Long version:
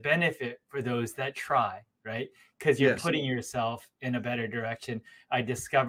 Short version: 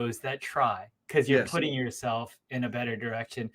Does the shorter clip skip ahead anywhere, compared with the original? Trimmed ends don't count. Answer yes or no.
yes